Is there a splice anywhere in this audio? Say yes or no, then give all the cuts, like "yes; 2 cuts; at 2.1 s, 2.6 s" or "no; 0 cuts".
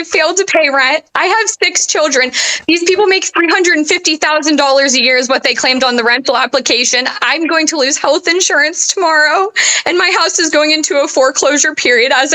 no; 0 cuts